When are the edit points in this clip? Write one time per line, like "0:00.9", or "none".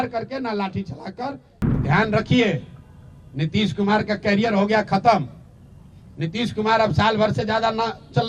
0:01.5